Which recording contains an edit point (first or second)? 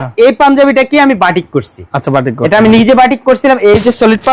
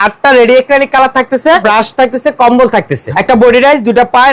second